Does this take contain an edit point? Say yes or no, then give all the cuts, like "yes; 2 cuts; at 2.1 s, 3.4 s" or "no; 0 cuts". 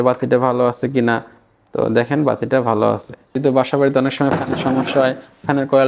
yes; 1 cut; at 3.2 s